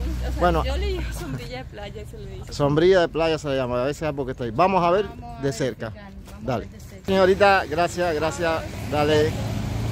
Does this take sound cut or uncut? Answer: uncut